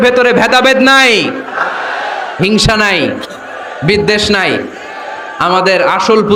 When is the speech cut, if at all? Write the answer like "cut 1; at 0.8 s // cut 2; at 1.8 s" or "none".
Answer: none